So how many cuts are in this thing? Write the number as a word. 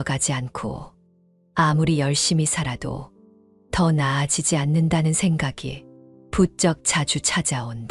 zero